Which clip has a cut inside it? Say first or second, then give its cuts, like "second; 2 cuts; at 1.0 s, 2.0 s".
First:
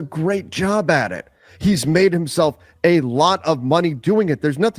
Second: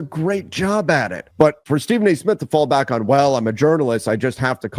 second; 1 cut; at 1.5 s